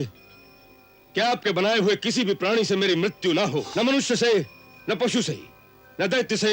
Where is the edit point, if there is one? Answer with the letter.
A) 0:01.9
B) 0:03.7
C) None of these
B